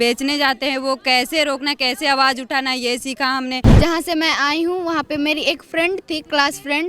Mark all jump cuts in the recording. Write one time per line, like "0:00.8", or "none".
0:03.8

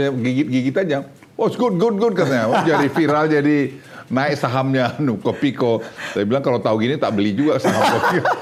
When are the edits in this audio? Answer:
none

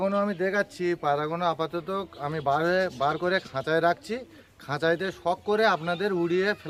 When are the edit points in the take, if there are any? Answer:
none

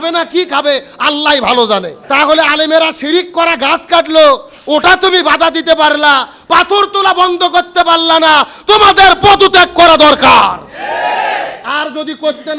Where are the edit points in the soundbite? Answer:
0:02.0

